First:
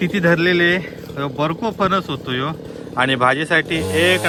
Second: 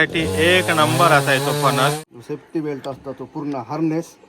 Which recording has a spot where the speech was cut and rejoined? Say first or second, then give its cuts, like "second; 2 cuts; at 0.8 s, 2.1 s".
second; 1 cut; at 2.0 s